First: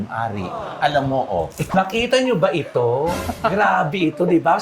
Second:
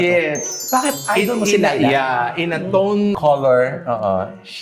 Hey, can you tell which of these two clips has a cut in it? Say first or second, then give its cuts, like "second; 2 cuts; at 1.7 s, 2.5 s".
first; 1 cut; at 1.7 s